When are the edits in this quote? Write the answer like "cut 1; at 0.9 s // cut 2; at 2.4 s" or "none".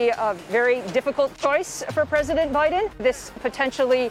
cut 1; at 3.0 s

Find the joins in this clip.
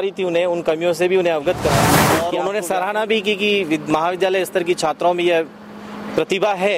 cut 1; at 2.2 s

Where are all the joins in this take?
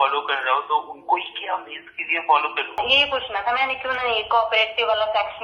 cut 1; at 2.8 s

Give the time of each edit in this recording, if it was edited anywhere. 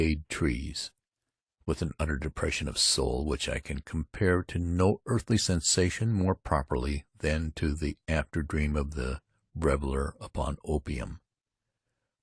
cut 1; at 8.7 s

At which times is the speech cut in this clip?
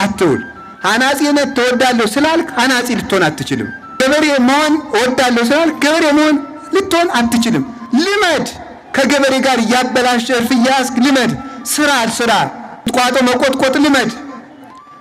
cut 1; at 4.0 s // cut 2; at 7.8 s // cut 3; at 12.9 s

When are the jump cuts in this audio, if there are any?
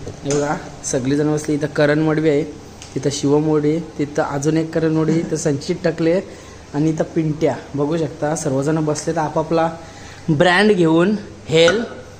none

